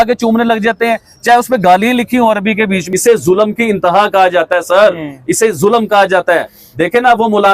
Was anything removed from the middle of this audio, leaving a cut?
yes; 1 cut; at 2.8 s

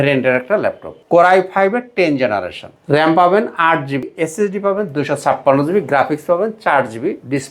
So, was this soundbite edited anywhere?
yes; 3 cuts; at 0.9 s, 2.7 s, 4.1 s

